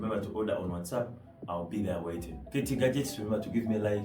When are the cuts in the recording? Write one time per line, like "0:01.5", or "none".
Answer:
0:02.4